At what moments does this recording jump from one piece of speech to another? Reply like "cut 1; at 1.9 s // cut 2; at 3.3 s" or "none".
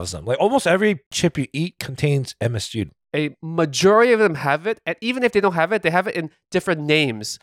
cut 1; at 1.1 s // cut 2; at 2.9 s